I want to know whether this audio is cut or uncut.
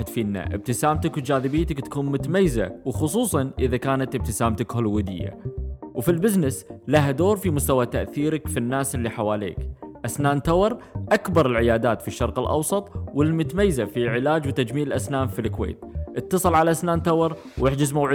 uncut